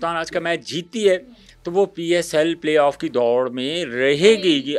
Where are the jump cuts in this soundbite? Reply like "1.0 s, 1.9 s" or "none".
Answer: none